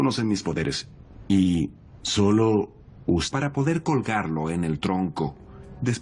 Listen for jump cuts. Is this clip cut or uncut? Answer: uncut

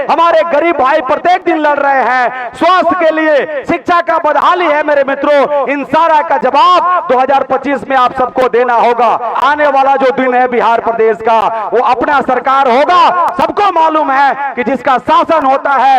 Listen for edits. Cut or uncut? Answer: cut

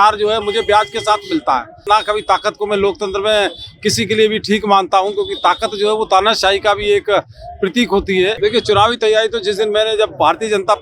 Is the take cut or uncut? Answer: cut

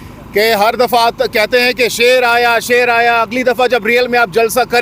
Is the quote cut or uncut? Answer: uncut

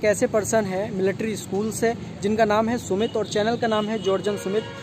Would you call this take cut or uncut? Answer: uncut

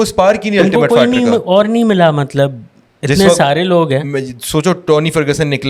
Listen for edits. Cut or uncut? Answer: uncut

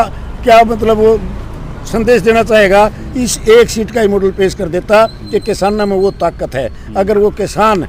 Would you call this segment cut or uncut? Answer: uncut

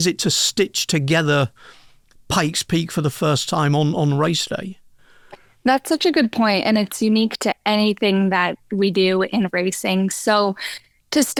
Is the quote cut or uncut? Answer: uncut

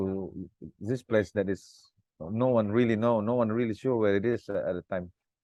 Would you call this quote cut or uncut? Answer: uncut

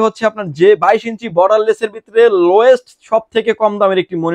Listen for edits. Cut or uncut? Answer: uncut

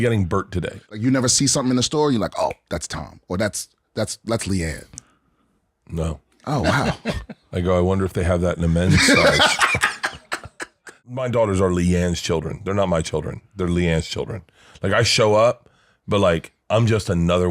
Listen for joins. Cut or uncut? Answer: cut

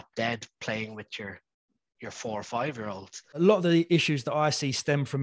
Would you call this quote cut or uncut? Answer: cut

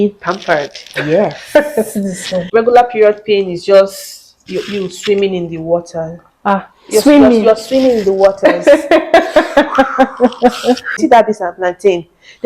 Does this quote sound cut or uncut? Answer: cut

